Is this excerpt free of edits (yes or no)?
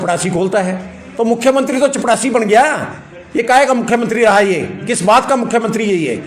yes